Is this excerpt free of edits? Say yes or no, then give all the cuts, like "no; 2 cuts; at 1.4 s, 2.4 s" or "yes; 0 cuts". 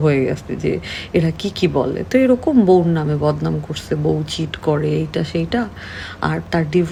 yes; 0 cuts